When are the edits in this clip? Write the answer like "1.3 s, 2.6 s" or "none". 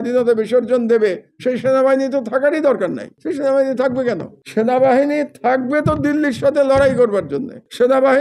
none